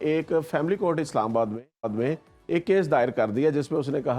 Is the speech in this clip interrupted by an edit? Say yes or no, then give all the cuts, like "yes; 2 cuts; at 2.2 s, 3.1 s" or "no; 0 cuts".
no; 0 cuts